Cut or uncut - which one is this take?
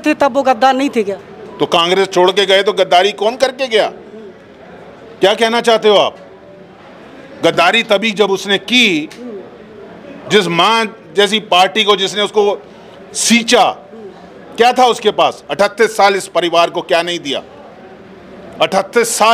uncut